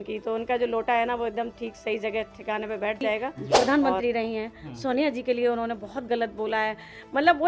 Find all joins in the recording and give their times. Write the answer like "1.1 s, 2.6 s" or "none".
3.4 s